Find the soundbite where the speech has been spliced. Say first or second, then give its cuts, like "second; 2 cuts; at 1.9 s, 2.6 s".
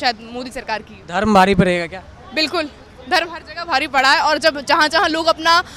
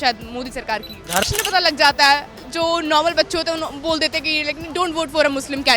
second; 1 cut; at 1.2 s